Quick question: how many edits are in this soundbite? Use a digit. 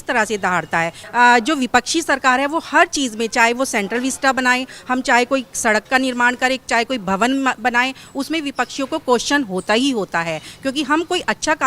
1